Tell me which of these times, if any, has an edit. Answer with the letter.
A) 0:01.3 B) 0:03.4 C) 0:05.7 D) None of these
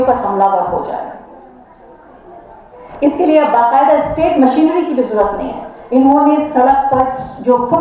D